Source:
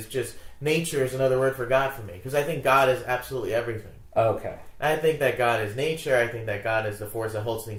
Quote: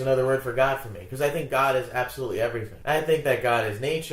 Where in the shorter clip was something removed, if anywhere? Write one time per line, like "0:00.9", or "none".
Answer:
0:02.7